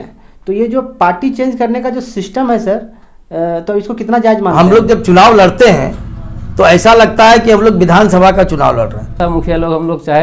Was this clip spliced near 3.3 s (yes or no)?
no